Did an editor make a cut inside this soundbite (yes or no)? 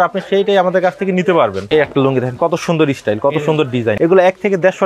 yes